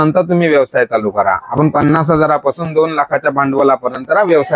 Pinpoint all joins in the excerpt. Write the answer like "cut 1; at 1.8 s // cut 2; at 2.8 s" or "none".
cut 1; at 1.4 s

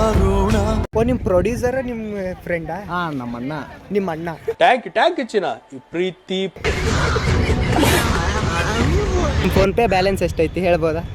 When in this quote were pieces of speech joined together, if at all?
none

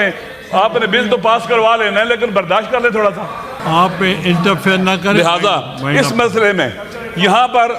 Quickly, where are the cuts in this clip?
cut 1; at 3.5 s

